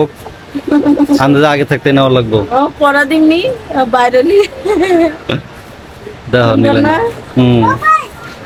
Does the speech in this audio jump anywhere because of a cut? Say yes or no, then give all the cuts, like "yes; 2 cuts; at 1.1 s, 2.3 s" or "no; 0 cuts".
no; 0 cuts